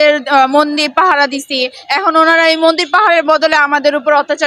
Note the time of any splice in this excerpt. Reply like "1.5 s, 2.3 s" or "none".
none